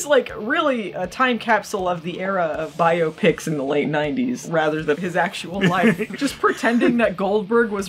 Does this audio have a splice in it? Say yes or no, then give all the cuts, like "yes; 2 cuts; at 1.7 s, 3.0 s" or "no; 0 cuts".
yes; 3 cuts; at 0.9 s, 5.0 s, 6.1 s